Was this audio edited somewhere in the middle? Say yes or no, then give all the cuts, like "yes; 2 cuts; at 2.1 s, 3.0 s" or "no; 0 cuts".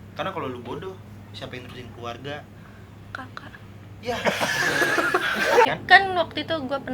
yes; 1 cut; at 5.7 s